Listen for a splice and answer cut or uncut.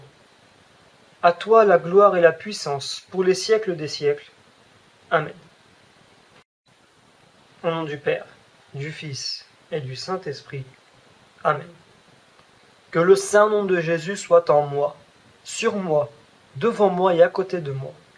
cut